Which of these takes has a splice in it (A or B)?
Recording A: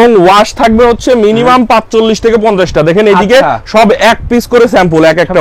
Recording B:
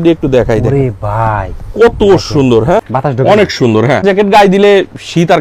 B